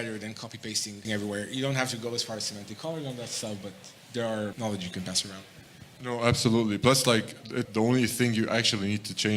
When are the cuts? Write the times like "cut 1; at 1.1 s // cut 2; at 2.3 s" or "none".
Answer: cut 1; at 1.0 s // cut 2; at 4.5 s // cut 3; at 7.7 s